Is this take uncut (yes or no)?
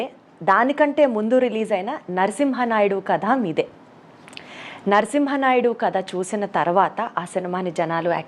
yes